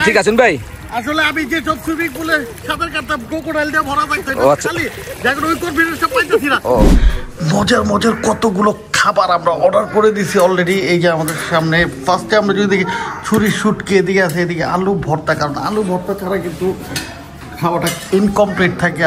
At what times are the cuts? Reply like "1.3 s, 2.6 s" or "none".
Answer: 6.8 s